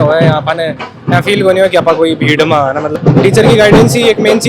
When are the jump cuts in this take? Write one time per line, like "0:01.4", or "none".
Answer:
0:03.0